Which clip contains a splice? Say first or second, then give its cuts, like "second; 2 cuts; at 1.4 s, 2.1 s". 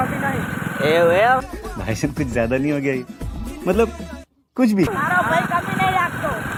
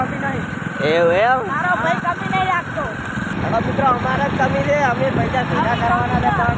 second; 2 cuts; at 1.5 s, 3.3 s